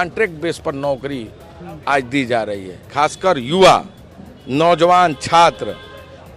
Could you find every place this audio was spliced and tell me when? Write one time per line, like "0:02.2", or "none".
0:02.8